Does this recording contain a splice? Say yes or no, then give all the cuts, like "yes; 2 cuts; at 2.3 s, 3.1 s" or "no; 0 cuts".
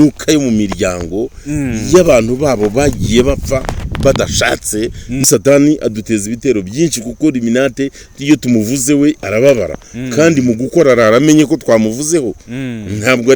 yes; 1 cut; at 5.2 s